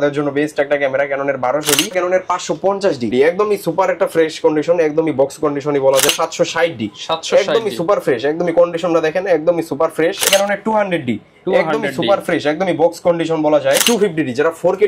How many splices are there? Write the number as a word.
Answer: five